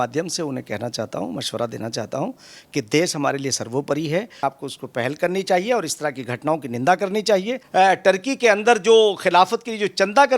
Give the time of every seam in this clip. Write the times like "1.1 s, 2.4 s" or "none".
4.4 s, 7.6 s